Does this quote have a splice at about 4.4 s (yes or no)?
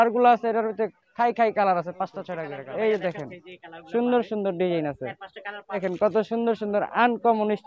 no